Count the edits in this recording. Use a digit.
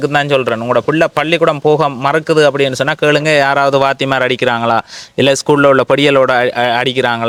0